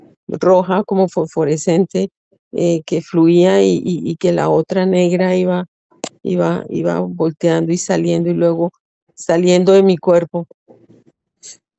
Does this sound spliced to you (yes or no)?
no